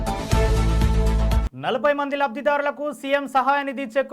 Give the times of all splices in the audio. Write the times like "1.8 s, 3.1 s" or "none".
1.4 s

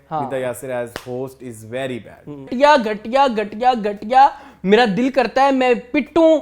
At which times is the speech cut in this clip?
2.5 s

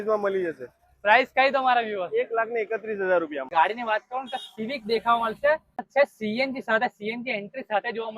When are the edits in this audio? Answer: 3.5 s, 5.9 s

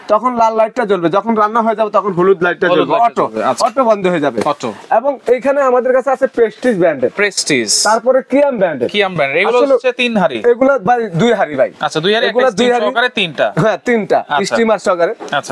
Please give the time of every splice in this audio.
none

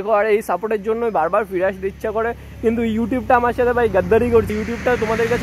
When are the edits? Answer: 4.5 s

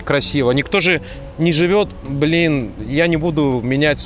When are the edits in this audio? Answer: none

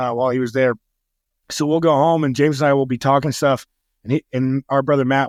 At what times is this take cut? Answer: none

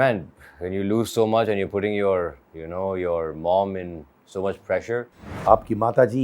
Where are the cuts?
5.3 s

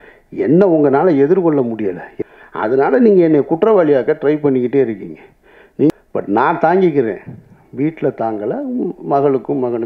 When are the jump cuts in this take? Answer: 2.1 s, 5.9 s

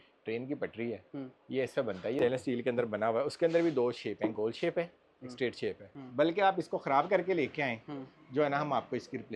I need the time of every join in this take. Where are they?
2.2 s, 5.9 s

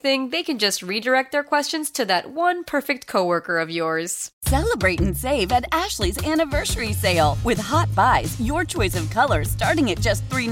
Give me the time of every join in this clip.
4.2 s

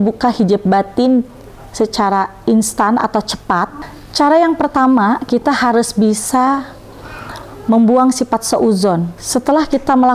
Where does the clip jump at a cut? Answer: 9.2 s

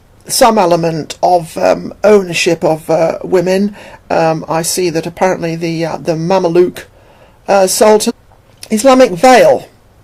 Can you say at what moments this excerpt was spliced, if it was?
none

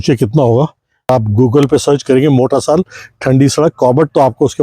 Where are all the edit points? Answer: 1.1 s

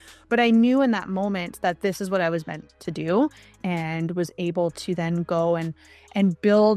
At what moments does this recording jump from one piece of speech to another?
3.5 s

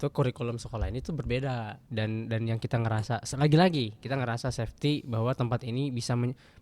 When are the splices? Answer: 1.8 s

